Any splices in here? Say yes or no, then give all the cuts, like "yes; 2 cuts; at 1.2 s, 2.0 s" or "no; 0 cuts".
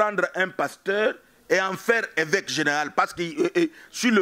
no; 0 cuts